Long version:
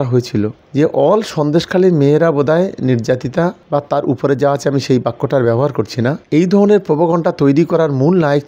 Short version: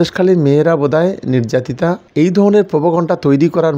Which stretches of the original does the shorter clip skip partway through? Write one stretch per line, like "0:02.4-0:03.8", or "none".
0:03.6-0:06.2